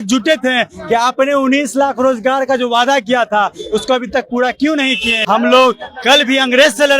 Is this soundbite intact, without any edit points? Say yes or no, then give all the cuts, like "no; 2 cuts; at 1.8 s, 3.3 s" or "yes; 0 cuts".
no; 1 cut; at 5.1 s